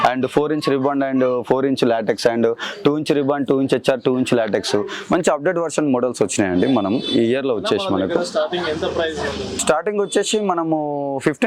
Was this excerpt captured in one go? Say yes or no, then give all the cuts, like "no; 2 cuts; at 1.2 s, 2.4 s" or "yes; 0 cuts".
yes; 0 cuts